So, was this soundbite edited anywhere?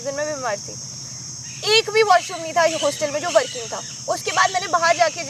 no; 0 cuts

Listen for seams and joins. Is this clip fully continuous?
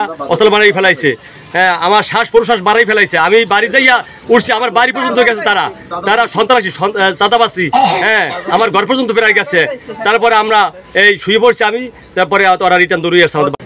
yes; 0 cuts

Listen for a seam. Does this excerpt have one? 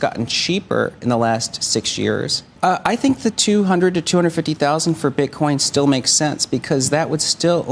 yes; 1 cut; at 2.5 s

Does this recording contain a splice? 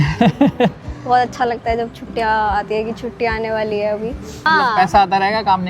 yes; 1 cut; at 4.5 s

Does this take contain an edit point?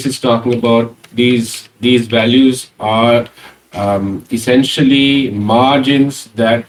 no; 0 cuts

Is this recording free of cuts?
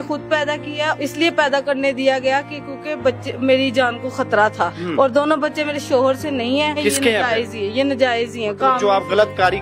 no; 3 cuts; at 0.9 s, 4.8 s, 6.8 s

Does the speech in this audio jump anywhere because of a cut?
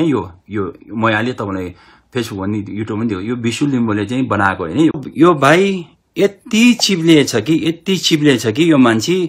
yes; 1 cut; at 5.1 s

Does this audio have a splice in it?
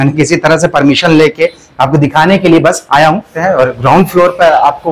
yes; 1 cut; at 3.3 s

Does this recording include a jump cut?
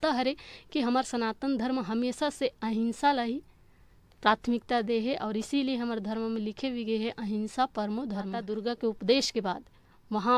yes; 1 cut; at 8.4 s

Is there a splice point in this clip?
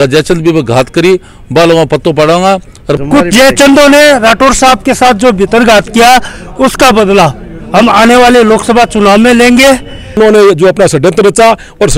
yes; 2 cuts; at 2.9 s, 10.2 s

